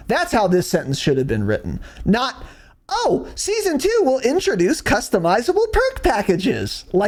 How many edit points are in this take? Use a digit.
0